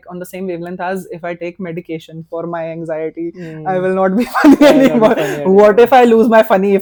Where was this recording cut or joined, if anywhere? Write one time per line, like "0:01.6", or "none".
none